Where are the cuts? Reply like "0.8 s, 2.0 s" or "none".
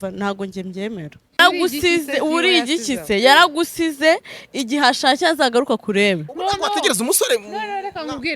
1.4 s